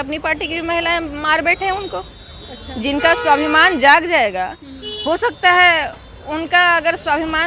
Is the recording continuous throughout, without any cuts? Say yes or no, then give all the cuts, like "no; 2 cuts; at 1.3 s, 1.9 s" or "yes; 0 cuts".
yes; 0 cuts